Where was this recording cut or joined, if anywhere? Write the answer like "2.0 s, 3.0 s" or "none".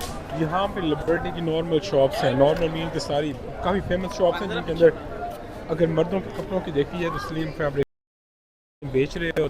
none